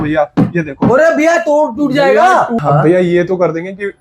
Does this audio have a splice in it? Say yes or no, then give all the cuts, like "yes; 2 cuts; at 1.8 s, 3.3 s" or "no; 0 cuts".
yes; 1 cut; at 2.6 s